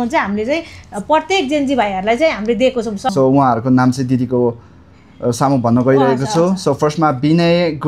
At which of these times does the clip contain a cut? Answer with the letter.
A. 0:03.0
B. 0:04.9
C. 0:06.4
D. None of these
A